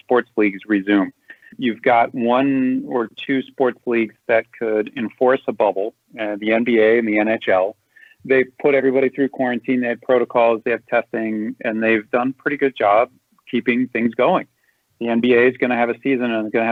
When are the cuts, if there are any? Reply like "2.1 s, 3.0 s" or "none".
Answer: none